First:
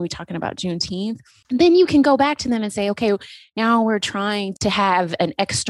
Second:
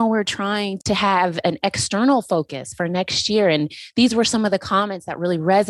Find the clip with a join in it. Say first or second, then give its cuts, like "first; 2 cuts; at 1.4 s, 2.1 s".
first; 1 cut; at 1.3 s